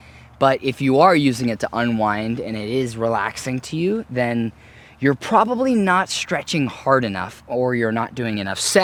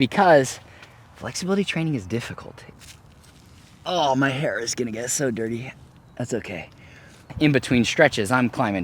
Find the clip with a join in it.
second; 2 cuts; at 2.6 s, 7.3 s

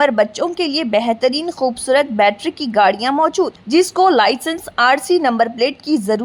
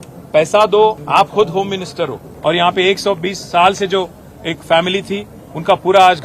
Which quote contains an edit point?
second; 2 cuts; at 1.0 s, 2.2 s

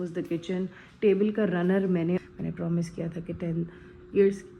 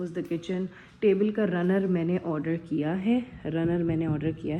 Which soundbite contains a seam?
first; 1 cut; at 2.2 s

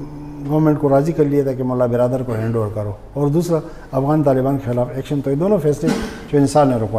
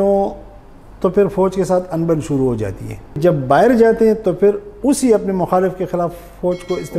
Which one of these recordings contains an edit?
second; 1 cut; at 3.2 s

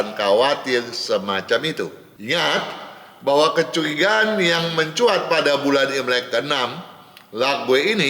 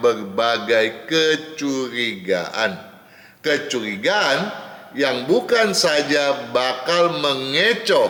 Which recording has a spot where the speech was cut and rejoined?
first; 1 cut; at 2.1 s

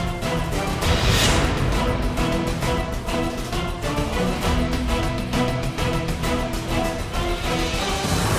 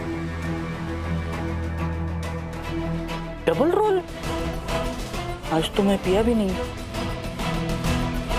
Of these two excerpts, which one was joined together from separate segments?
second; 2 cuts; at 2.7 s, 4.3 s

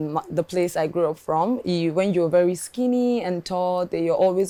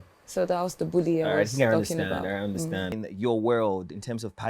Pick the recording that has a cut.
second; 1 cut; at 2.9 s

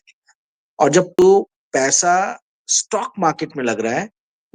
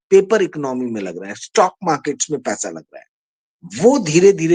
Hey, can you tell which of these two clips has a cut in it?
first; 1 cut; at 1.1 s

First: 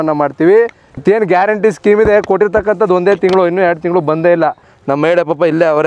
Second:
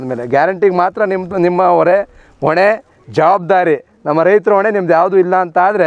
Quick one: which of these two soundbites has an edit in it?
first; 1 cut; at 1.0 s

